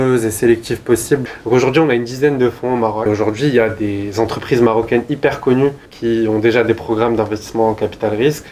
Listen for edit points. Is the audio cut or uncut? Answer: cut